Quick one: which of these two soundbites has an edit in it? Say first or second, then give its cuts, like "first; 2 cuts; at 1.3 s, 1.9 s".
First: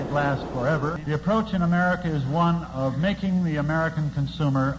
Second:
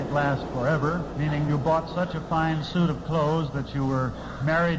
first; 1 cut; at 1.0 s